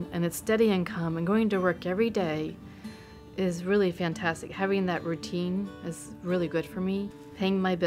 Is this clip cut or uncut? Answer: uncut